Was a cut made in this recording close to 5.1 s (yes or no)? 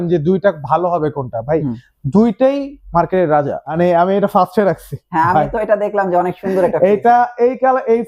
no